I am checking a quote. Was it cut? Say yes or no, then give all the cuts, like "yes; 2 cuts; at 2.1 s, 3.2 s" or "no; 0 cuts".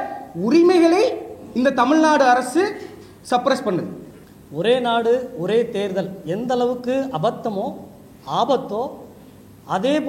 yes; 1 cut; at 4.2 s